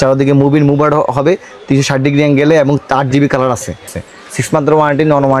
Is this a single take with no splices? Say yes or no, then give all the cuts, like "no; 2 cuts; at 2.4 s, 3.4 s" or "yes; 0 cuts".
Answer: no; 1 cut; at 4.0 s